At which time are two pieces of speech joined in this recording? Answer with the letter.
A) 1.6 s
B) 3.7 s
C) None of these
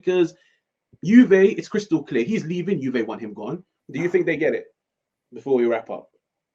B